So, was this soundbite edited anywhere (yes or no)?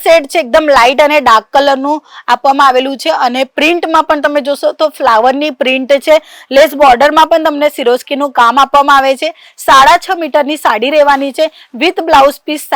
no